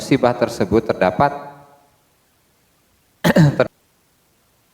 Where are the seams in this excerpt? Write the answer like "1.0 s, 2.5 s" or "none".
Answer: 3.7 s